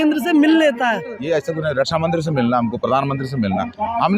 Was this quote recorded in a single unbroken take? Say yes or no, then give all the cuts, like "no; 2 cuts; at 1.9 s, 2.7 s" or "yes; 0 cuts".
no; 1 cut; at 1.2 s